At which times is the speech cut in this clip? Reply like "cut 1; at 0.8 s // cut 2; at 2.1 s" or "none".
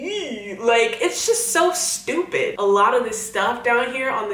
cut 1; at 2.5 s